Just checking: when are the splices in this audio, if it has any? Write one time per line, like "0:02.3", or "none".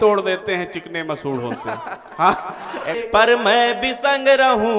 0:03.0